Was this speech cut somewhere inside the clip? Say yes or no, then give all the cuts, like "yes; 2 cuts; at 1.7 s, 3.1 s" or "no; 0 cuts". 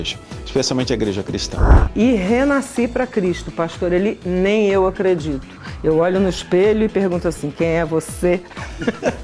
yes; 1 cut; at 1.8 s